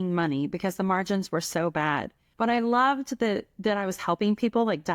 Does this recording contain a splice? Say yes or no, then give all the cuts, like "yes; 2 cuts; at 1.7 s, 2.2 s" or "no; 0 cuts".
yes; 1 cut; at 2.2 s